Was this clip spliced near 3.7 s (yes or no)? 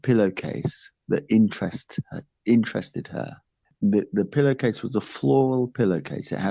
yes